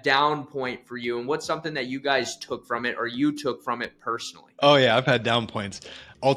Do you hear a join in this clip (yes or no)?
yes